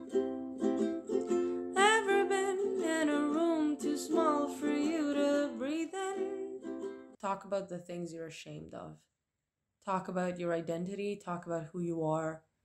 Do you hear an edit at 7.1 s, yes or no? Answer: yes